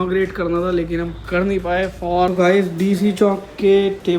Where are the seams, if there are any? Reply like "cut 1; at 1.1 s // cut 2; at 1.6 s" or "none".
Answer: cut 1; at 2.3 s